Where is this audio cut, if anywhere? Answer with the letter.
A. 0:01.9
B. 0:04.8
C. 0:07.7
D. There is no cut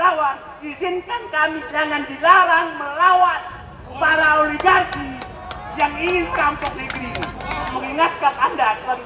C